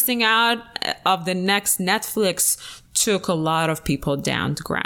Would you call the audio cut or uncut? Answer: uncut